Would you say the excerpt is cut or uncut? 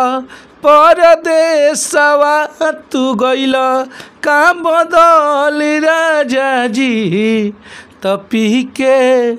uncut